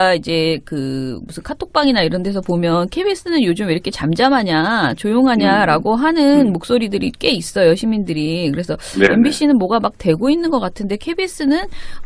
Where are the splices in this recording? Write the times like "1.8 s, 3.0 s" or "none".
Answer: 5.0 s